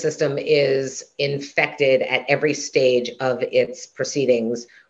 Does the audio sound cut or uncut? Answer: uncut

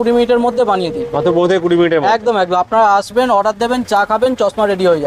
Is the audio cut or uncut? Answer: uncut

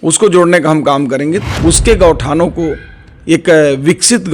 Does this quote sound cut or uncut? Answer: cut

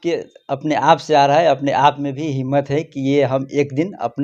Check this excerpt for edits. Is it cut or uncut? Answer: uncut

